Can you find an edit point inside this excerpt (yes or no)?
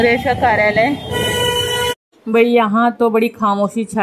no